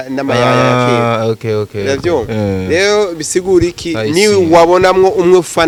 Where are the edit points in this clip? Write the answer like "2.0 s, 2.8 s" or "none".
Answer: none